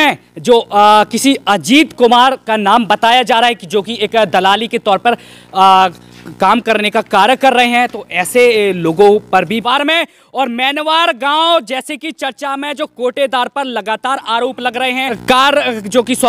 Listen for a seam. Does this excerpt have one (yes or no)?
yes